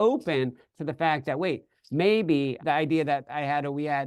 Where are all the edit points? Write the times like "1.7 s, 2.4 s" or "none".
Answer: 2.6 s